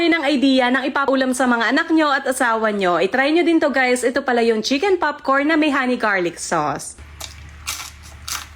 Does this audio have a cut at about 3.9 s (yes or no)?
no